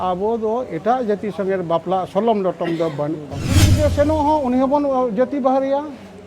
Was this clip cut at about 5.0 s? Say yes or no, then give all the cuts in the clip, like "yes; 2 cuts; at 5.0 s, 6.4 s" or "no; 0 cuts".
no; 1 cut; at 3.7 s